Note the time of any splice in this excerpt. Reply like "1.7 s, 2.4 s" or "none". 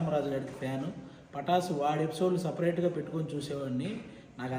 none